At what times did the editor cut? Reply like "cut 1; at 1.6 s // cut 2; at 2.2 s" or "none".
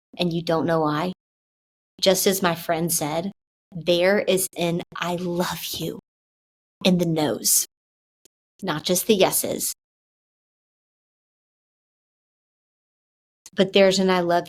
none